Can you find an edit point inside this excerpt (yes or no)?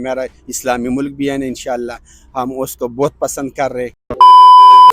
yes